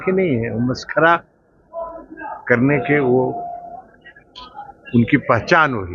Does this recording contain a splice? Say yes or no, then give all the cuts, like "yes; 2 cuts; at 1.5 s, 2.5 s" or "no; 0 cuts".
no; 0 cuts